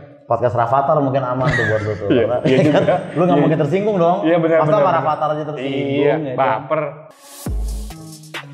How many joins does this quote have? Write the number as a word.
one